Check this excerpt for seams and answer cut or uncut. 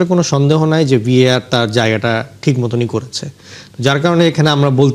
uncut